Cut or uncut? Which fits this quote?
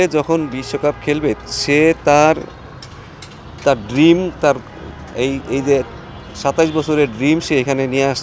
uncut